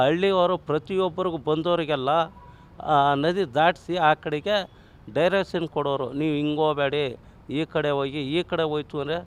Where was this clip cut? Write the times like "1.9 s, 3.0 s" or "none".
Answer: none

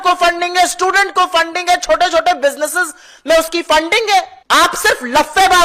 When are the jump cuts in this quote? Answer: 4.4 s

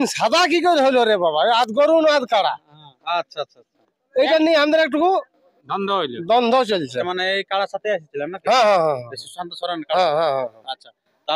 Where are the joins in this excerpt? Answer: 7.1 s

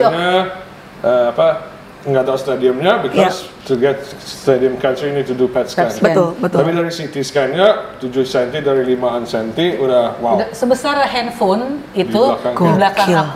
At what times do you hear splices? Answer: none

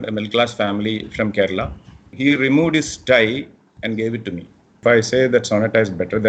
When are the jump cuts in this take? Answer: 2.1 s, 4.8 s

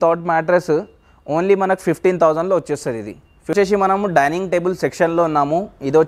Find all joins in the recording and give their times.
3.5 s

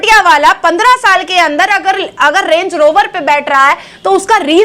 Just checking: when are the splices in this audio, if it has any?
none

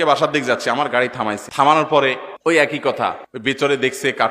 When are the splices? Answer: 1.4 s, 2.3 s, 3.3 s

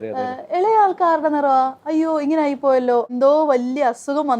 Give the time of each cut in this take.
3.1 s

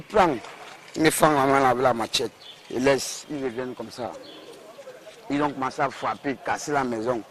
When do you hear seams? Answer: 3.9 s

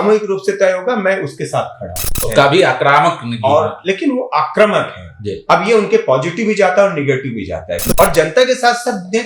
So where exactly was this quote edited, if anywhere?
2.1 s, 7.9 s

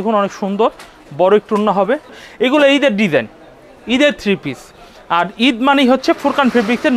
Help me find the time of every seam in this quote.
2.2 s

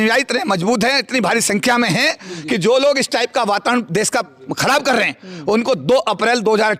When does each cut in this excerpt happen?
none

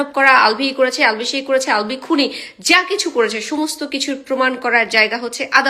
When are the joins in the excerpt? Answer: none

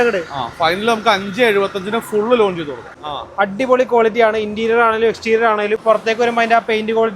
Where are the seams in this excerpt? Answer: 2.9 s, 5.8 s

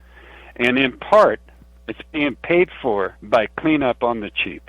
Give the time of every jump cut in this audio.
3.2 s

